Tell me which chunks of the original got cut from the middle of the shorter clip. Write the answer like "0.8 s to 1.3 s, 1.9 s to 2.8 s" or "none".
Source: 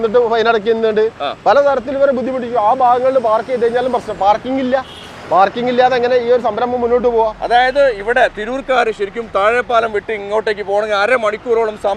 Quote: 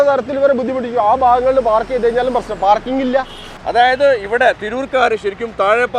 5.2 s to 7.4 s